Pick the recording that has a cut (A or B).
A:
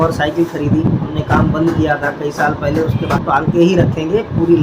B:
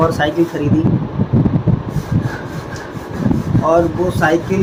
A